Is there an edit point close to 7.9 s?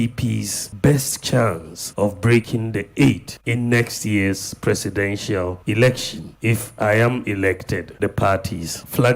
yes; 1 cut; at 7.9 s

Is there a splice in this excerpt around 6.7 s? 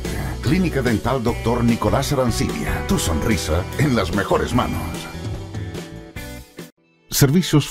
yes; 1 cut; at 6.7 s

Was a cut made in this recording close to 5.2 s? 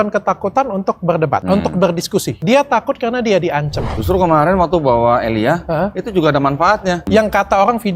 no; 4 cuts; at 1.4 s, 2.3 s, 3.9 s, 7.0 s

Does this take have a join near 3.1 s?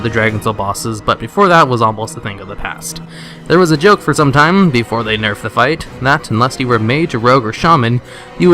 yes; 1 cut; at 3.1 s

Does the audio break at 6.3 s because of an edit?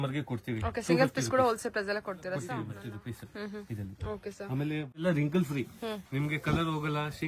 no; 2 cuts; at 2.8 s, 5.0 s

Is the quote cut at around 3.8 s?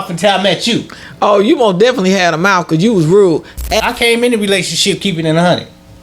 yes; 1 cut; at 3.8 s

